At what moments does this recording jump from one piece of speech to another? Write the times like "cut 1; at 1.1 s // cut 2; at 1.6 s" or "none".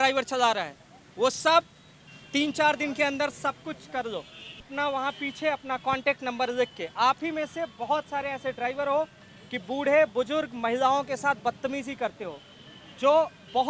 cut 1; at 4.6 s